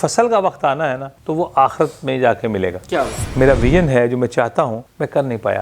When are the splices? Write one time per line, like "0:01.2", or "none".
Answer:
0:03.2